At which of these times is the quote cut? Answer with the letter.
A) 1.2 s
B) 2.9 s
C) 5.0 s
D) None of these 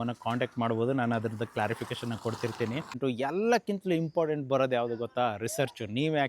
B